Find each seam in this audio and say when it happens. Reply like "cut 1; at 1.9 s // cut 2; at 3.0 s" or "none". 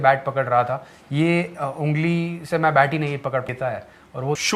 cut 1; at 3.4 s